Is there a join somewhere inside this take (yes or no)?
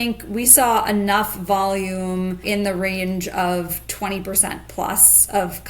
yes